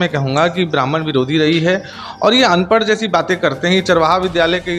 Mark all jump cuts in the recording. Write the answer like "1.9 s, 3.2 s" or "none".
none